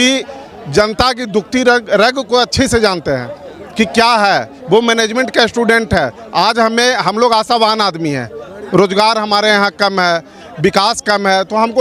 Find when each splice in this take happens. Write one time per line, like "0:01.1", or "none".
none